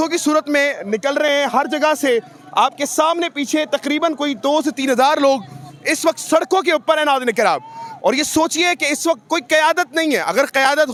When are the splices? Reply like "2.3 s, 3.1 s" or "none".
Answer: none

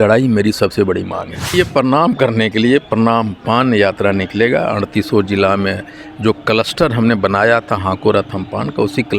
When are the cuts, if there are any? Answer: 1.5 s

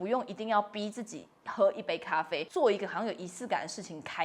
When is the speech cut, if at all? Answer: 2.4 s

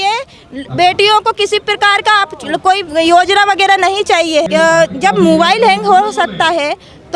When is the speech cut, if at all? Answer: 4.5 s

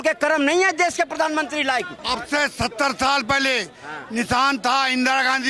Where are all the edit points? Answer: 1.9 s

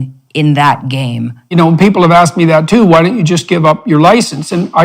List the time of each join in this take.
1.5 s

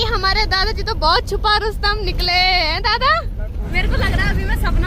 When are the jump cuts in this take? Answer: 3.7 s

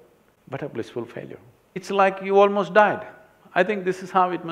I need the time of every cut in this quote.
1.8 s

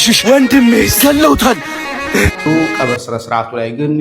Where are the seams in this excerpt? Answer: 2.5 s

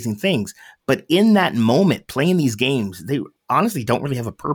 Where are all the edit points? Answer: 3.3 s

